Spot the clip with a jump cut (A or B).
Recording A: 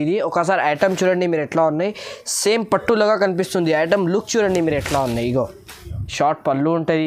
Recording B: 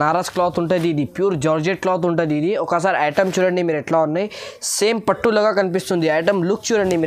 A